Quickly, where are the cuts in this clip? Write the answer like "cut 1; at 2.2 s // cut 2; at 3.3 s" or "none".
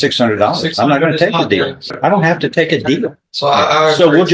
cut 1; at 1.8 s